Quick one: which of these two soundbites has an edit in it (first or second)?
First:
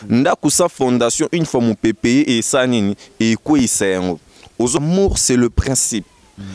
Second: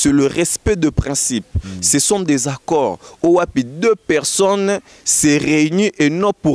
first